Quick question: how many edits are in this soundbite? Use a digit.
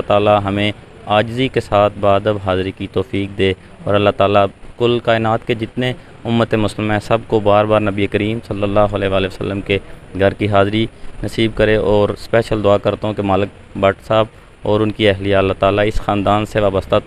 0